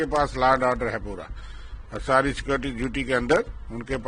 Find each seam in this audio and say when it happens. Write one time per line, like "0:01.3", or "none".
none

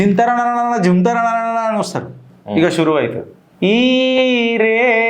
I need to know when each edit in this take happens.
0:02.2

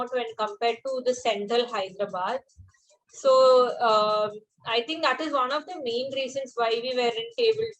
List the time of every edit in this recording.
none

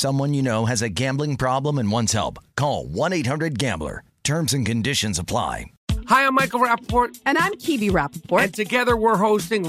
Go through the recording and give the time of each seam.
0:05.7

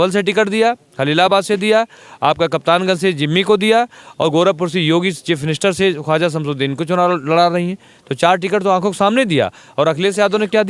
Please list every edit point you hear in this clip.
none

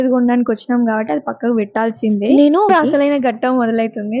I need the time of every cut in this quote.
0:02.7

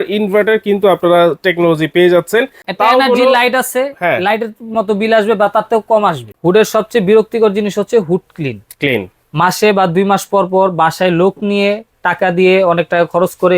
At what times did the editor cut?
0:02.6
0:06.3

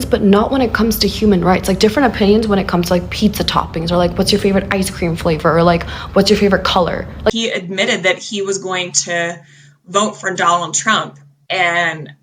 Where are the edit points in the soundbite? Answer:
0:07.3

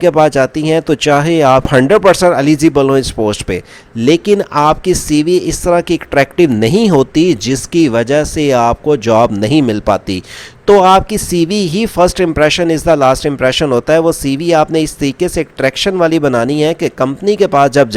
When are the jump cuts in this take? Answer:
0:01.7

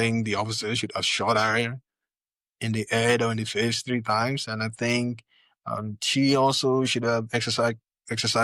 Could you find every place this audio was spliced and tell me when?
none

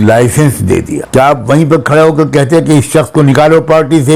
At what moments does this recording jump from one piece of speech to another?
0:01.0

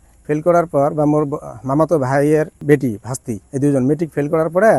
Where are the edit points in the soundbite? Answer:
0:02.5
0:03.4

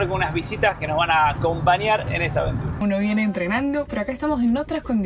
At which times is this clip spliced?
0:02.7

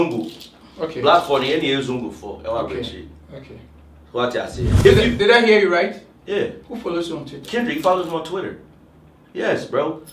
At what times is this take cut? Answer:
0:04.7

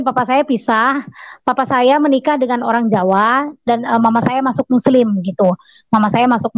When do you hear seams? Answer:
none

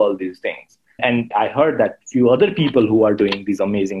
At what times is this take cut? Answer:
0:01.2

